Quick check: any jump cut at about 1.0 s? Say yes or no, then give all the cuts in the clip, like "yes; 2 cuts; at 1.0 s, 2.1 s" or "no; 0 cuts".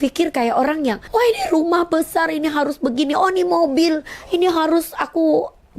yes; 1 cut; at 1.0 s